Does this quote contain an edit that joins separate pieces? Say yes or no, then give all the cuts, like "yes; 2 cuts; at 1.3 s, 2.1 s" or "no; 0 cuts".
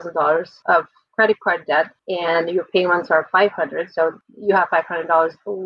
yes; 2 cuts; at 2.0 s, 4.2 s